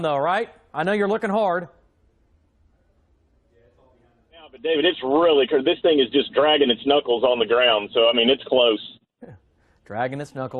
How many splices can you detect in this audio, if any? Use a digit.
1